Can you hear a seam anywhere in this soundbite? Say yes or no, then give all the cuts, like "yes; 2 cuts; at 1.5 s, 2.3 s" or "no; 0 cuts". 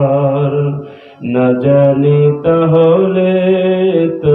no; 0 cuts